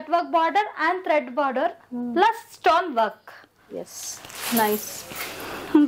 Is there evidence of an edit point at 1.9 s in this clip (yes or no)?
no